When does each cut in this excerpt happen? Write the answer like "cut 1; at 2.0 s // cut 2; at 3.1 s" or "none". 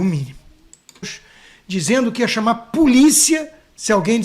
cut 1; at 1.0 s